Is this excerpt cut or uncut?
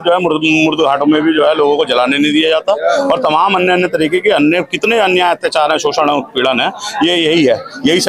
uncut